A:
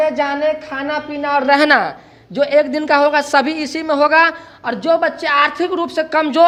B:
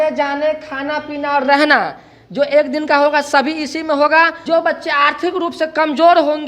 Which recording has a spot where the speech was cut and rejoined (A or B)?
B